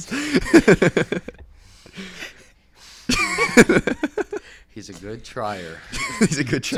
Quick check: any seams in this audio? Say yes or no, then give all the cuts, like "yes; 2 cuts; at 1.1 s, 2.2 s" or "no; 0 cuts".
no; 0 cuts